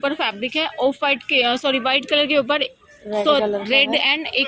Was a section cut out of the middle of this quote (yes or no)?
no